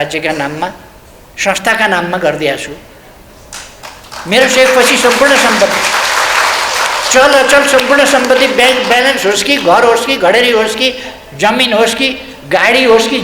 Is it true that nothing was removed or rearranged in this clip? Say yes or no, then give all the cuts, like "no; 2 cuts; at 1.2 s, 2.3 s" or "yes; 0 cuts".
yes; 0 cuts